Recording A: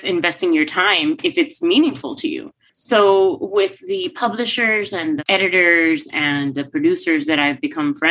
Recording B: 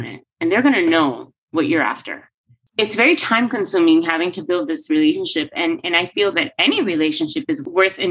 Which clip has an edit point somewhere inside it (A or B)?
B